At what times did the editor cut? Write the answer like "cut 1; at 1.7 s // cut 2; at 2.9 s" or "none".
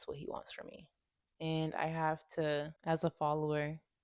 cut 1; at 2.7 s